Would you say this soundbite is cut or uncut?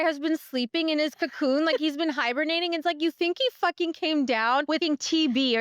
cut